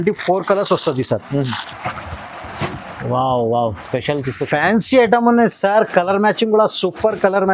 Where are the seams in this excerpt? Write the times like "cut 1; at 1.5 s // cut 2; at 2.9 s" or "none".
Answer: cut 1; at 1.6 s